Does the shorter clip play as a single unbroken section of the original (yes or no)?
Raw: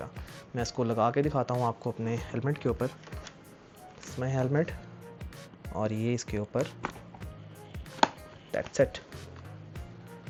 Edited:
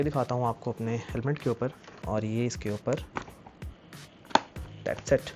no